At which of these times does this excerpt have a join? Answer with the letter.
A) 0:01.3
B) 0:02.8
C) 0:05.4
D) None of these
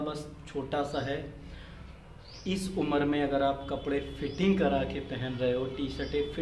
D